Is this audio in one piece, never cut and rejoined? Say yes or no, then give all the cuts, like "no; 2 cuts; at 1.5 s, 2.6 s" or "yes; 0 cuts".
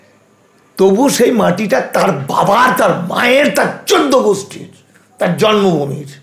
yes; 0 cuts